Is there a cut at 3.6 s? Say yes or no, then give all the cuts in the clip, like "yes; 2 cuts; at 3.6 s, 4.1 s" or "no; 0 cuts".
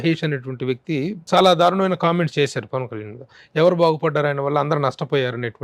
no; 1 cut; at 1.3 s